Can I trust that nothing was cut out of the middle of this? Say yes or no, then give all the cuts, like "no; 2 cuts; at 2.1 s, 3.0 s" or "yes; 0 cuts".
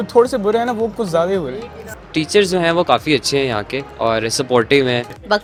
yes; 0 cuts